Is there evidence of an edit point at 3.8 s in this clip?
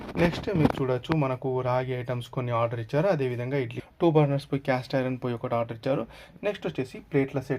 yes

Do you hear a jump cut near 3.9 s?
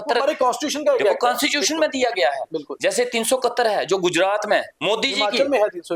no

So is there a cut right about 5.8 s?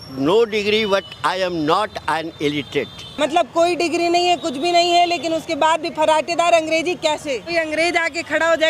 no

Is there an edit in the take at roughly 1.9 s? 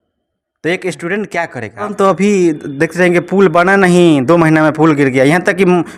yes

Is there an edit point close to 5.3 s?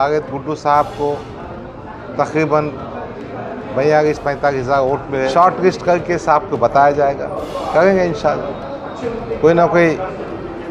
yes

